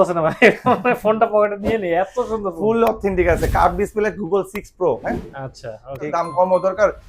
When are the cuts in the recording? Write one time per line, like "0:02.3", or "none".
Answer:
0:06.1